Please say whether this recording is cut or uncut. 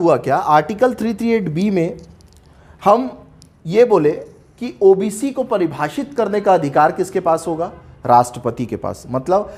uncut